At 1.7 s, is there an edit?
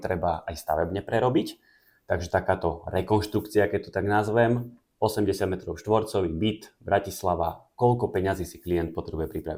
no; 0 cuts

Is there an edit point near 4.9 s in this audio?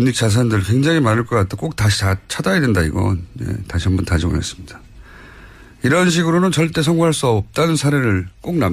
no; 1 cut; at 2.3 s

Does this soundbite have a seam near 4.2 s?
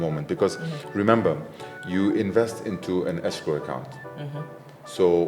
no; 0 cuts

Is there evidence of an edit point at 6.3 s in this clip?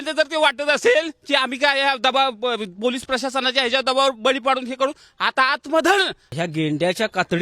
yes; 1 cut; at 6.3 s

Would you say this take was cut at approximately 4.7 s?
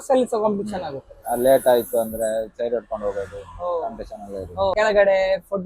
yes; 1 cut; at 4.7 s

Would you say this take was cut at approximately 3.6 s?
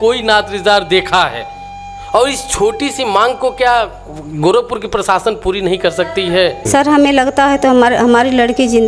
no; 1 cut; at 6.6 s

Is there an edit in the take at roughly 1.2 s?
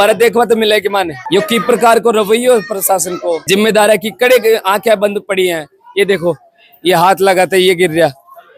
no; 0 cuts

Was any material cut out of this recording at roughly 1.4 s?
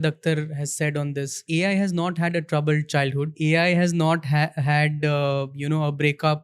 yes; 2 cuts; at 1.4 s, 3.3 s

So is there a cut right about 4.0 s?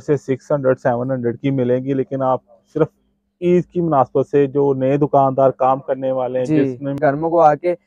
no; 1 cut; at 7.0 s

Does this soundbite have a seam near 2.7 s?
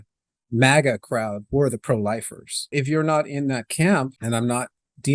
yes; 2 cuts; at 2.7 s, 4.2 s

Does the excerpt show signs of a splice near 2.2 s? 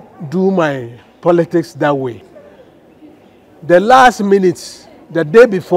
yes; 1 cut; at 2.2 s

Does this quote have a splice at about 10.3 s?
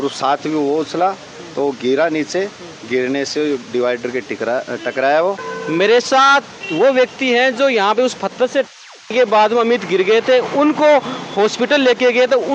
no; 1 cut; at 5.5 s

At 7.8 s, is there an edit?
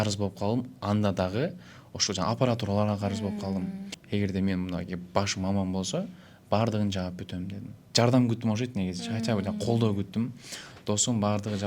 yes; 2 cuts; at 3.9 s, 7.8 s

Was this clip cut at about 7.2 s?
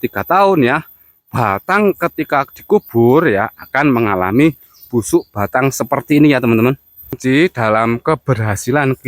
yes; 1 cut; at 7.2 s

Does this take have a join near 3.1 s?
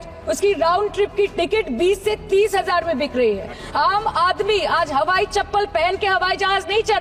no; 0 cuts

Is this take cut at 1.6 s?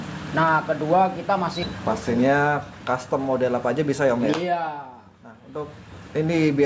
yes; 1 cut; at 1.6 s

